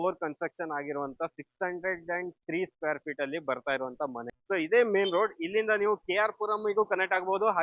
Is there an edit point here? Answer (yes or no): yes